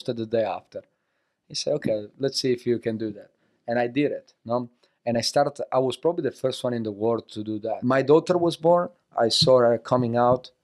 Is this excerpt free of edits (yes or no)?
no